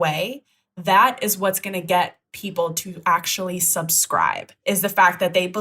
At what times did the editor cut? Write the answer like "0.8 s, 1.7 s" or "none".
4.5 s